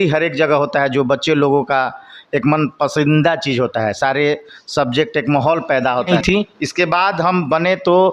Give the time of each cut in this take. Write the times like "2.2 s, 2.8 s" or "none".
6.1 s